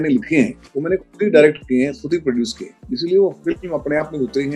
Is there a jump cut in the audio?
no; 0 cuts

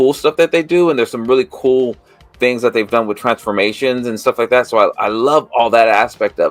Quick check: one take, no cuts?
yes; 0 cuts

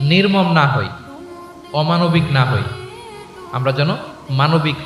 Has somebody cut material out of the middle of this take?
no; 0 cuts

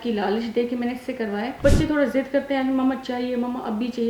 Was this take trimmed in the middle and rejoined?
yes; 1 cut; at 1.6 s

